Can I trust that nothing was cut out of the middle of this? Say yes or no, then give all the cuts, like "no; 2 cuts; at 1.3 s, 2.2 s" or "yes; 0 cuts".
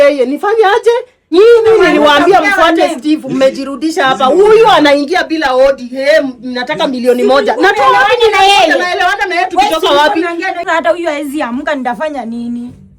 no; 2 cuts; at 1.2 s, 10.6 s